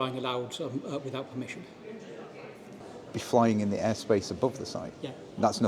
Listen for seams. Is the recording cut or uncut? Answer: cut